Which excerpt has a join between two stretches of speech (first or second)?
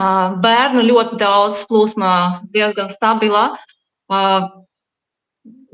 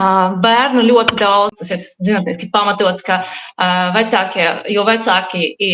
second